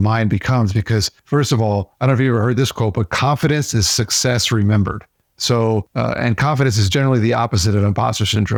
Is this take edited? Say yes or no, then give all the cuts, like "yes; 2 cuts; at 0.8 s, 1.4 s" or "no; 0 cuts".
no; 0 cuts